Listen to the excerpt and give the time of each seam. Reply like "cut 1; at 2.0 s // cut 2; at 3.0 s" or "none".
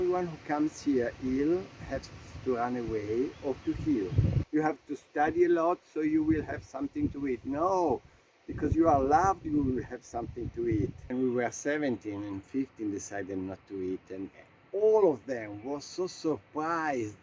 cut 1; at 4.4 s // cut 2; at 11.0 s // cut 3; at 14.3 s